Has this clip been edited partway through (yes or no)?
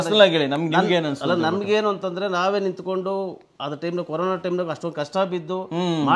no